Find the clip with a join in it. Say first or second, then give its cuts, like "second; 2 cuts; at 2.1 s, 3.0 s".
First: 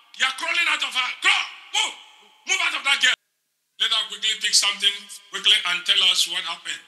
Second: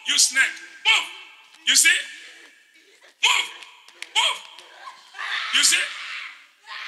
first; 1 cut; at 3.2 s